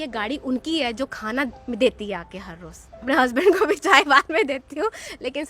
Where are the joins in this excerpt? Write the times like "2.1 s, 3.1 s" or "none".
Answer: 3.0 s